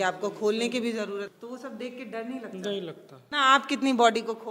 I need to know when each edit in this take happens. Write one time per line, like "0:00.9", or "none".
0:01.3
0:03.2